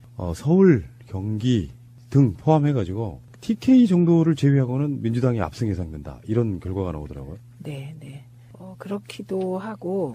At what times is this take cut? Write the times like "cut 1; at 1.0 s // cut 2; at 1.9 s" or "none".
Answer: none